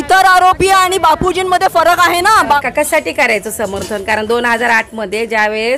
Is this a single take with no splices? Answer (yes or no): no